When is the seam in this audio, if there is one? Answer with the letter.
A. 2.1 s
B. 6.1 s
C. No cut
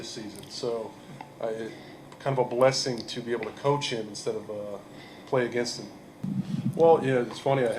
B